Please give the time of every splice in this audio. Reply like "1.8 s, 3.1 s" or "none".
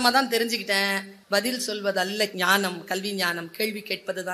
1.1 s, 2.3 s